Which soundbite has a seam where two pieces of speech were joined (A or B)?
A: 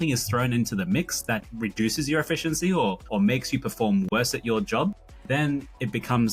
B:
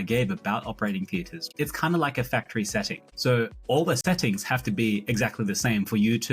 B